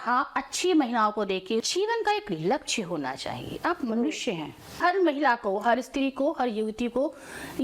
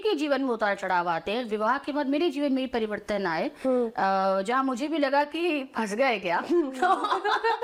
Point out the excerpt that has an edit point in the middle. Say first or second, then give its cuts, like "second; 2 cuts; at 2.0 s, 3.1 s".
first; 2 cuts; at 1.6 s, 4.8 s